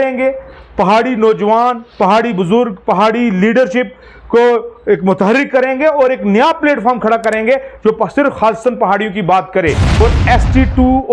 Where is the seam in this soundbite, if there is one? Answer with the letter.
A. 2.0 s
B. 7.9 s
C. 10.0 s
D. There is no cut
C